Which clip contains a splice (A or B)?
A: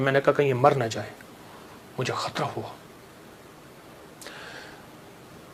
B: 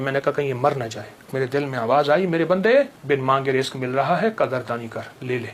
B